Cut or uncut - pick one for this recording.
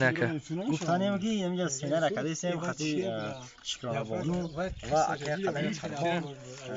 uncut